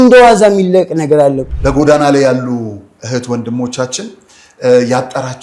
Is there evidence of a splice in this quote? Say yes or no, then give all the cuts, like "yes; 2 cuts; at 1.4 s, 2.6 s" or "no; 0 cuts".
yes; 1 cut; at 1.4 s